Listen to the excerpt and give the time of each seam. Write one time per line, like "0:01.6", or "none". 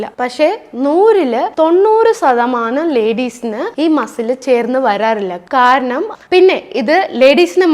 0:06.1